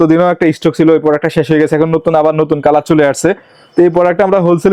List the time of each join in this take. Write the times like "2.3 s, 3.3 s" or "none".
none